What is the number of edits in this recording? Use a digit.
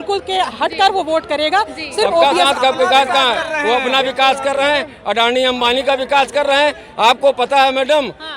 1